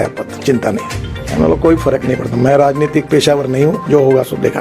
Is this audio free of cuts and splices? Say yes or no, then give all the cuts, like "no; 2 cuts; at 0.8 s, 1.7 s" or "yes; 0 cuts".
no; 1 cut; at 1.2 s